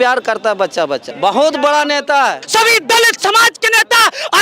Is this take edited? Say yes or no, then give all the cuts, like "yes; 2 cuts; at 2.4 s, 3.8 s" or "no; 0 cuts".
yes; 2 cuts; at 1.1 s, 2.4 s